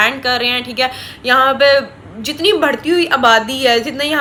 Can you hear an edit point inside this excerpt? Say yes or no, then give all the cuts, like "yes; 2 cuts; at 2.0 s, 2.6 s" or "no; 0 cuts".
no; 0 cuts